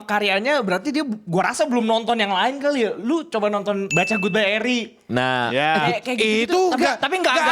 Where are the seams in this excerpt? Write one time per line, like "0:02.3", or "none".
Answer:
0:03.9